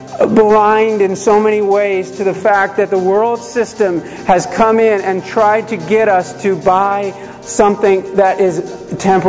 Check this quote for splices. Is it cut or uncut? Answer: uncut